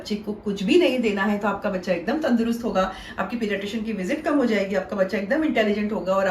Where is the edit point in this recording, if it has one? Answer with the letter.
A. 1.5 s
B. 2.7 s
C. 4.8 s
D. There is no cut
D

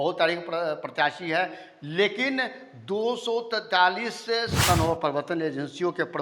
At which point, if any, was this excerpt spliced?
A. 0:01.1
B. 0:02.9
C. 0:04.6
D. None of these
C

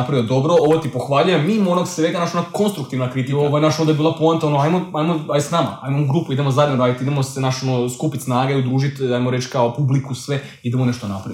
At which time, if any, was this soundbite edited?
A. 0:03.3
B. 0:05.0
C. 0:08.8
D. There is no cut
A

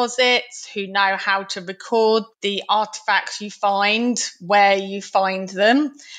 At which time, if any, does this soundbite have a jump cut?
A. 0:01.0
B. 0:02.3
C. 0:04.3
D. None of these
B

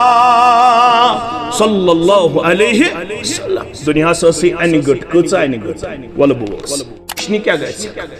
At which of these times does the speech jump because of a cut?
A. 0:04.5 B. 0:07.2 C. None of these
B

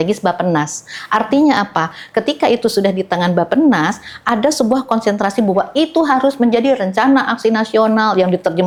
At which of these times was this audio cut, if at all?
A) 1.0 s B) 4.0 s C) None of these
C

